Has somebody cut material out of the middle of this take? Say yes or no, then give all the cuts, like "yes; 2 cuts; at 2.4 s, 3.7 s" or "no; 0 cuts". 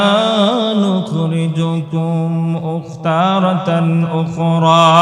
no; 0 cuts